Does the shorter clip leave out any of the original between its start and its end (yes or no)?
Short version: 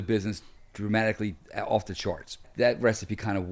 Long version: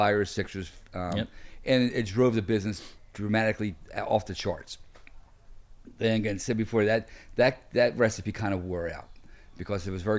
yes